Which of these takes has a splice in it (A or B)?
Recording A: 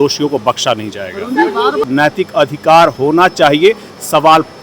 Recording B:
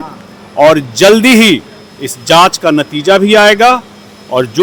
A